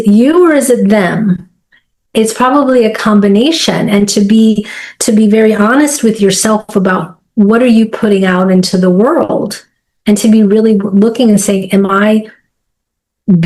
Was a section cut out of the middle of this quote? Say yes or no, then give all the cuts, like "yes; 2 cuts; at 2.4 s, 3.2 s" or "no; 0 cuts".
no; 0 cuts